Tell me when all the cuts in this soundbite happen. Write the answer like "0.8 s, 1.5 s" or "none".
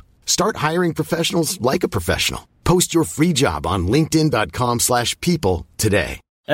none